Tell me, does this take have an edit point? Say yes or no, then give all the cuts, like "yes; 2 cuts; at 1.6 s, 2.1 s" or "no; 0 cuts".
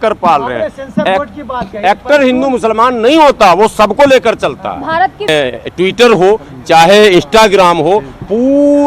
yes; 1 cut; at 5.3 s